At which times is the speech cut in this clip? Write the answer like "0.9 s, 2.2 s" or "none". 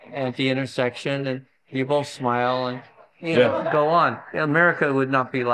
4.2 s